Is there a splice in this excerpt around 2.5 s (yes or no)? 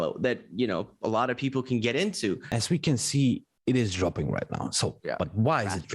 yes